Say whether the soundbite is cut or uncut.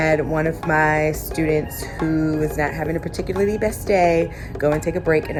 uncut